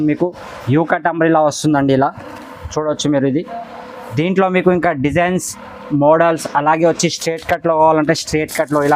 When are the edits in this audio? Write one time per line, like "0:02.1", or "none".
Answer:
none